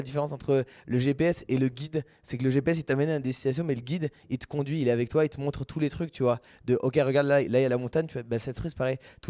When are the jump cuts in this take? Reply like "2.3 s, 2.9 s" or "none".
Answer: none